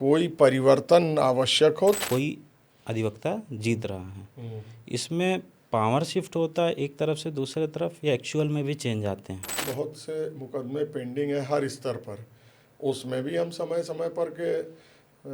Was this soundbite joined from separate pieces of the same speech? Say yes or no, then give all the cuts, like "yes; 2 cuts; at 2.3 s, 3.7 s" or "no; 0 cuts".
yes; 2 cuts; at 2.0 s, 9.5 s